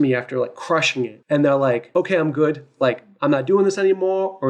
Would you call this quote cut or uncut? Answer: cut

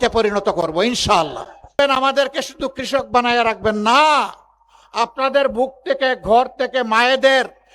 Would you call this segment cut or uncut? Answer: cut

